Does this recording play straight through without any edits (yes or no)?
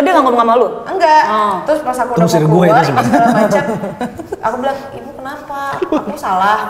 yes